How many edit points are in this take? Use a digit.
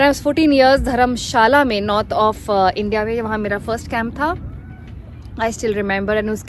0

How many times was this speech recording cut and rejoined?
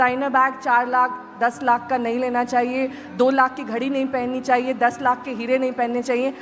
0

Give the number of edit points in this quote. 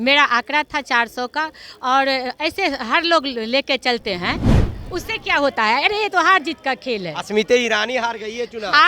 1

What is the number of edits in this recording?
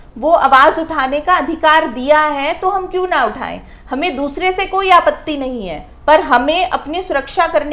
0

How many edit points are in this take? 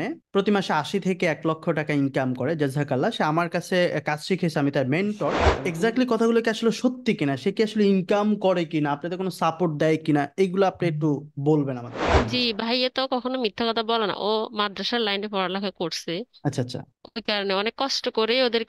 2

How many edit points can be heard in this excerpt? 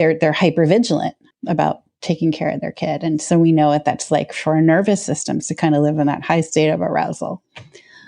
1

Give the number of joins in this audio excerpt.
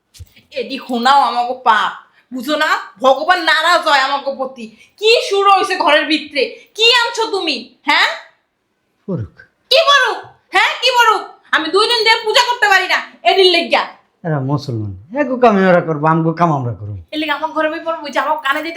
0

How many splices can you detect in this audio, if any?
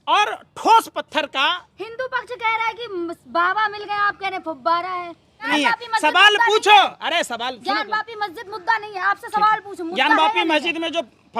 1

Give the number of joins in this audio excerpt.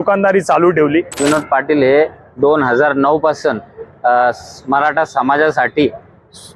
1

